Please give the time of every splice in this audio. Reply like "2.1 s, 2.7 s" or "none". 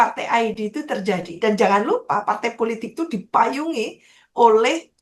1.3 s

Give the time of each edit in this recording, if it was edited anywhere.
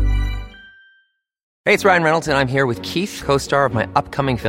1.5 s

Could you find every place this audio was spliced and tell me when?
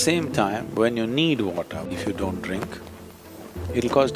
1.9 s

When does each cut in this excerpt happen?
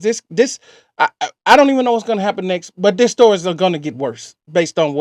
none

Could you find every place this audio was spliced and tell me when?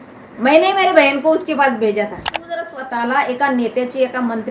2.8 s

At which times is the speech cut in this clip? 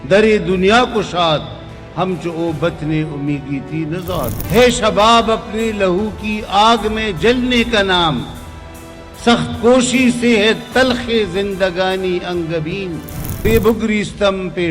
4.4 s, 13.4 s

